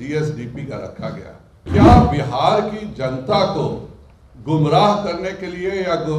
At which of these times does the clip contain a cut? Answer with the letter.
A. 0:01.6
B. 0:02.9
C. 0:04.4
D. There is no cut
A